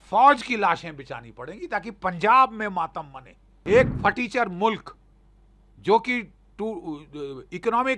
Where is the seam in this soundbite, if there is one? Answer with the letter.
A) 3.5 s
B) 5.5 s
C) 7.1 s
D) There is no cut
A